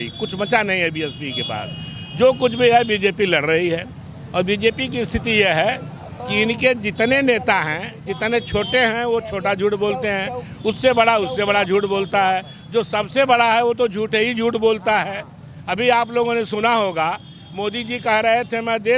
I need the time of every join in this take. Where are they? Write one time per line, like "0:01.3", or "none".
none

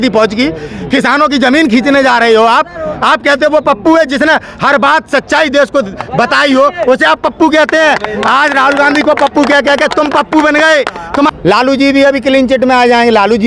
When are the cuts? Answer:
0:11.3

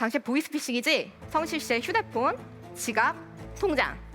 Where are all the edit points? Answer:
0:01.2

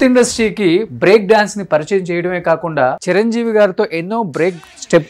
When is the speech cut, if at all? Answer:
0:03.0

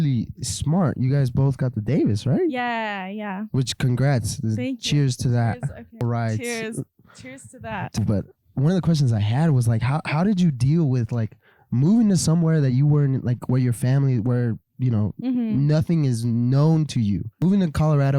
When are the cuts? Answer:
0:06.0
0:08.0
0:17.3

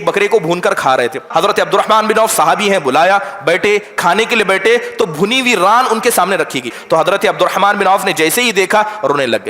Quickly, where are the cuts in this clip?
0:01.3
0:06.8

